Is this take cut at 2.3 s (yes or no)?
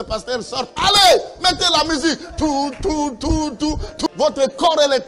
no